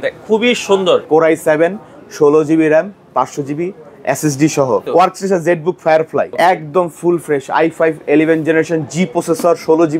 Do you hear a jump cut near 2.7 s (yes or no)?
no